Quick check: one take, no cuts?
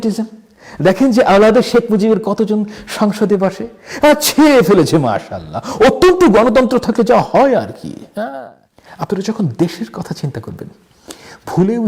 no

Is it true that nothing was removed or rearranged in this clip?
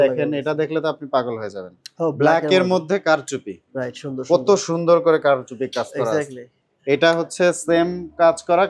yes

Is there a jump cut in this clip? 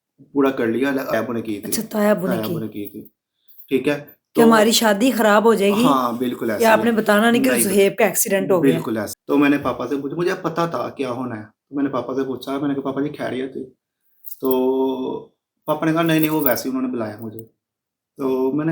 yes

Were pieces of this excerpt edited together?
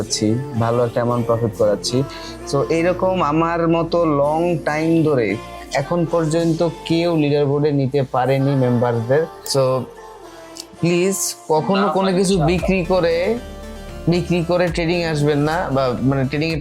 yes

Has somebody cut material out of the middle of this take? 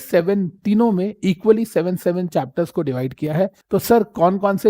yes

